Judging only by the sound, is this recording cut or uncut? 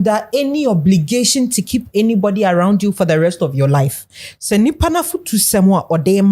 uncut